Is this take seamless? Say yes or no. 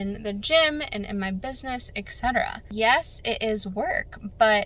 no